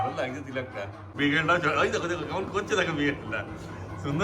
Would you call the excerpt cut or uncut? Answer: cut